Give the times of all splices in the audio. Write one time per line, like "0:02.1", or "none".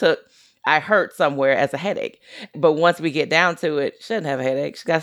0:02.5